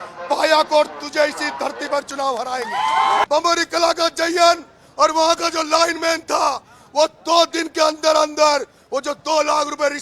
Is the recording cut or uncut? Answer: cut